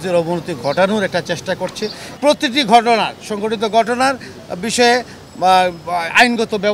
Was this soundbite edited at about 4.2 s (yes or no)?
no